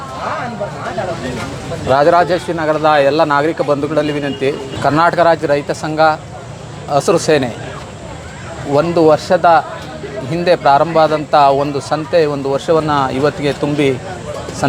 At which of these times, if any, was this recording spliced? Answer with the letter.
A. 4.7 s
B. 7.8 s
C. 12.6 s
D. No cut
A